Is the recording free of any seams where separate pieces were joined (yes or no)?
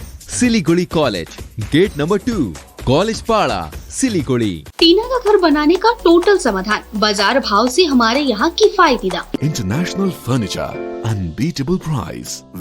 no